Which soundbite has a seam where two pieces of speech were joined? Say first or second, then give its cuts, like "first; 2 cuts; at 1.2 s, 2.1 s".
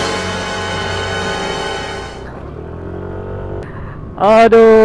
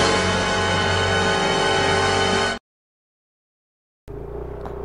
first; 2 cuts; at 2.0 s, 3.6 s